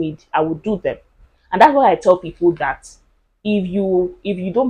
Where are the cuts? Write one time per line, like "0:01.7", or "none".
none